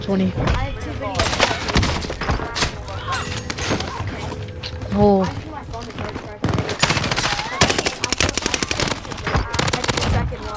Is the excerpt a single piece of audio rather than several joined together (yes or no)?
yes